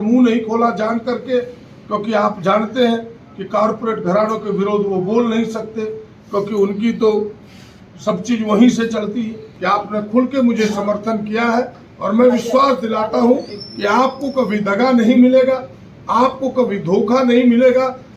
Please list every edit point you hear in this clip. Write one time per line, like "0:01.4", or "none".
0:09.5